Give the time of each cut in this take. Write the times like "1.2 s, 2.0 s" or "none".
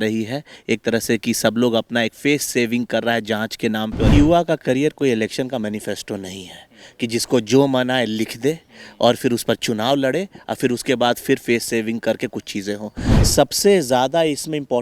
4.1 s, 13.2 s